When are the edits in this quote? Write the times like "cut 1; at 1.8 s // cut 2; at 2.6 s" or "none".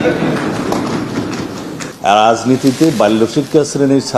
cut 1; at 1.8 s

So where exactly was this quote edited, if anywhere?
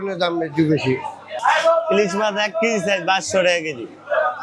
cut 1; at 1.2 s

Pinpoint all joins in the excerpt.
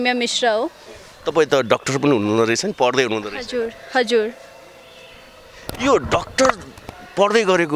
none

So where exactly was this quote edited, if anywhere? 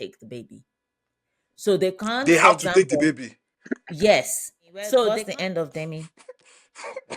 cut 1; at 5.1 s

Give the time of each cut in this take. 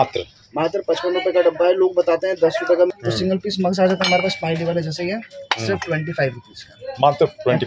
cut 1; at 2.9 s

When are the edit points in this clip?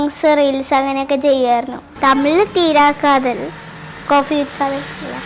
cut 1; at 1.8 s

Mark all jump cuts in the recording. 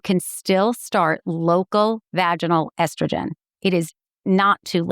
cut 1; at 3.9 s

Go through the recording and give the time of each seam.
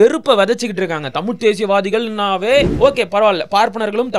cut 1; at 2.7 s

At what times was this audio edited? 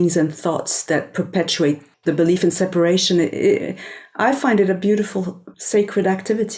cut 1; at 1.9 s // cut 2; at 5.5 s

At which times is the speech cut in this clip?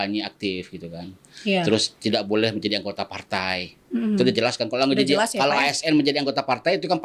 none

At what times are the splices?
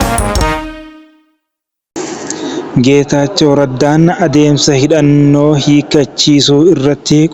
cut 1; at 2.0 s

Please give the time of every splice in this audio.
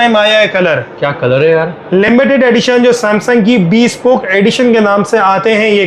none

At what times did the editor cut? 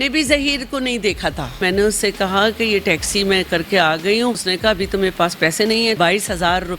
cut 1; at 1.6 s // cut 2; at 4.5 s // cut 3; at 6.0 s

